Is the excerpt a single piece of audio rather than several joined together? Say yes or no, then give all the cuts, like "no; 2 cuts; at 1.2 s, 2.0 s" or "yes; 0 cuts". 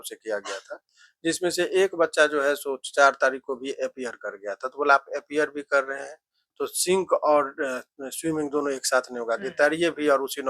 yes; 0 cuts